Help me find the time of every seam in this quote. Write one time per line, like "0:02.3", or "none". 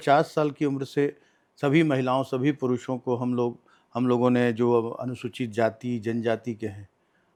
none